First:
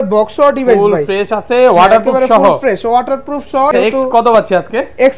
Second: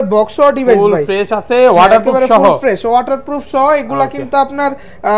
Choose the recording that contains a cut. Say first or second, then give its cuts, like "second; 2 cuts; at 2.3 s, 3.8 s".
first; 1 cut; at 3.7 s